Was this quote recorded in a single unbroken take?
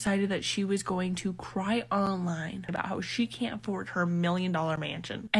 no; 1 cut; at 2.7 s

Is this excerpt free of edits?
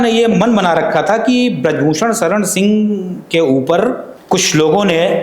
no; 1 cut; at 4.1 s

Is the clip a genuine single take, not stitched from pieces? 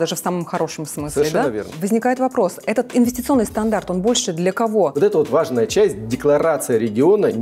no; 2 cuts; at 1.8 s, 4.9 s

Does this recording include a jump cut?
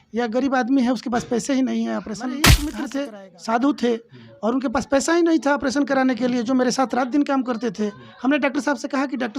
yes; 1 cut; at 2.7 s

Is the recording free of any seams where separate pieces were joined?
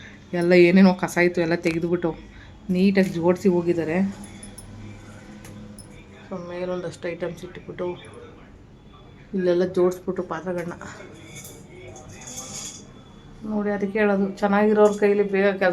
yes; 0 cuts

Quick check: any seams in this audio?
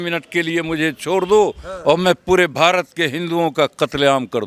no; 0 cuts

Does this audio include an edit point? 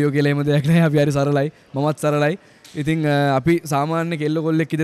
no; 0 cuts

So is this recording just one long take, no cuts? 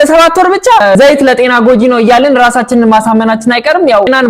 no; 1 cut; at 1.0 s

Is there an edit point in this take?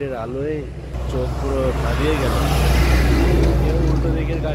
yes; 1 cut; at 1.0 s

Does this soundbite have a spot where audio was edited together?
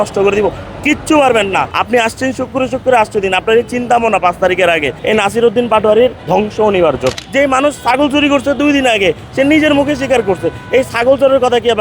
yes; 4 cuts; at 1.8 s, 4.9 s, 6.2 s, 7.1 s

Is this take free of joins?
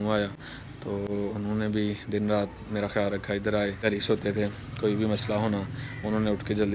no; 1 cut; at 3.8 s

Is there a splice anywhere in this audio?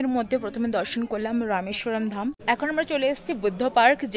yes; 1 cut; at 2.4 s

